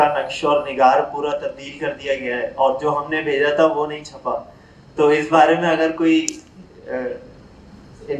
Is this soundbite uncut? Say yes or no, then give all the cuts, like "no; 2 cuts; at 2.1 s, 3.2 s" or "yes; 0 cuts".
yes; 0 cuts